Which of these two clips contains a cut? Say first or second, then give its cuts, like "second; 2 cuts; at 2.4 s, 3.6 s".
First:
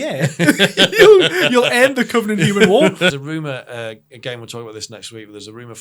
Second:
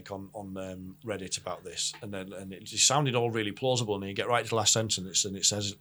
first; 1 cut; at 3.2 s